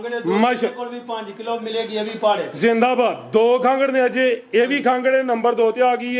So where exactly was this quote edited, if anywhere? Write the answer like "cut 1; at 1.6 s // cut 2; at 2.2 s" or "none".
none